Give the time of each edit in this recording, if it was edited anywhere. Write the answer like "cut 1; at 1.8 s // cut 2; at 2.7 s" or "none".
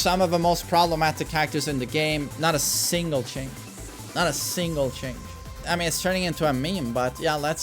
cut 1; at 5.5 s